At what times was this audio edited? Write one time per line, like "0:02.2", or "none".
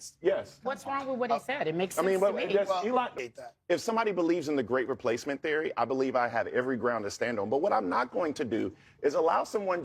0:03.1